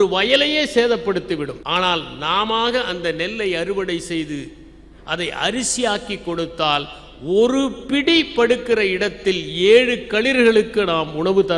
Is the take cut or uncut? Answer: cut